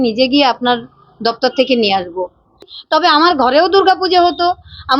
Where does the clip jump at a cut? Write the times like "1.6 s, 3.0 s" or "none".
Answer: 2.7 s